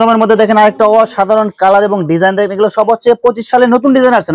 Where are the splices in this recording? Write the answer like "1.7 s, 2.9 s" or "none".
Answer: none